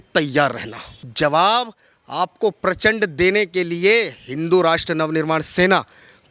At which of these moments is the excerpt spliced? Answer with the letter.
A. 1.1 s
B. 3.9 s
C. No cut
A